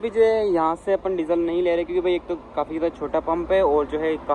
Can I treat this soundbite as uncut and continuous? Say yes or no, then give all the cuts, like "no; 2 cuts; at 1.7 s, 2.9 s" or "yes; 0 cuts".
yes; 0 cuts